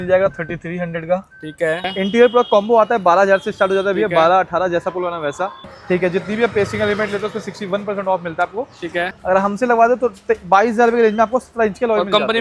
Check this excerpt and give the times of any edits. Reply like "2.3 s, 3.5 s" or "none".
1.9 s, 5.7 s, 9.1 s